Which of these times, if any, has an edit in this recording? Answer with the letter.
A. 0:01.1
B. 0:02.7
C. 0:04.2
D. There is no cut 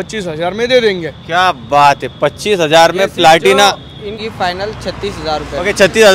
C